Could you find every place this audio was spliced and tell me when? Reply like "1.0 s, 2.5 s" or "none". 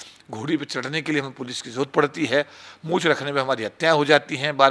none